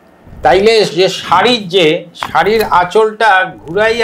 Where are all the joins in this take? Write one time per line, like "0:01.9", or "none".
none

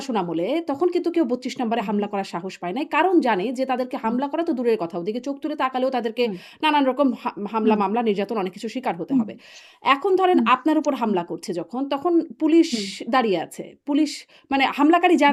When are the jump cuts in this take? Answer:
none

